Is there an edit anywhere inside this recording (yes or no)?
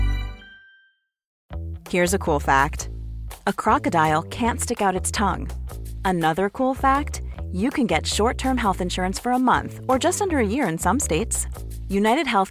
yes